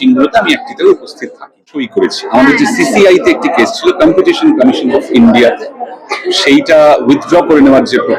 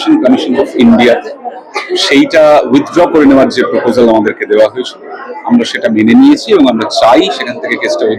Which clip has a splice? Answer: first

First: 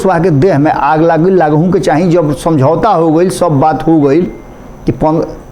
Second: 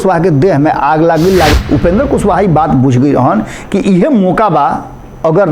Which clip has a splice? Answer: second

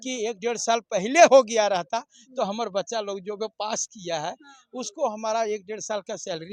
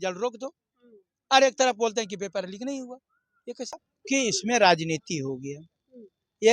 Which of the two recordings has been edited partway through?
second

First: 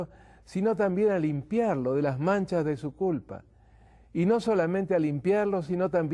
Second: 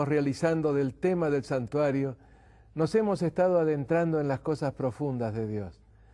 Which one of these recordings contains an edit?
first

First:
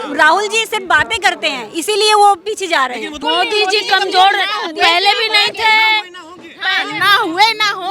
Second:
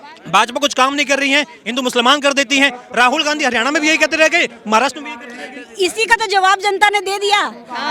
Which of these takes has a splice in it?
first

